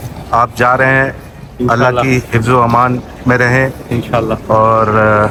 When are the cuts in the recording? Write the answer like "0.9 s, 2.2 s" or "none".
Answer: none